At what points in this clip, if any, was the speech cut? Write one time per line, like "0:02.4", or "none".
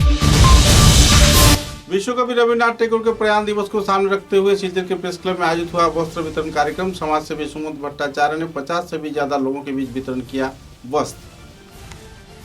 0:01.3

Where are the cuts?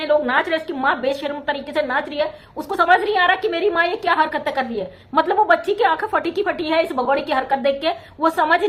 none

